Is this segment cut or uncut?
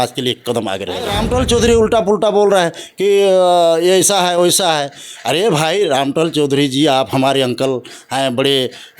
cut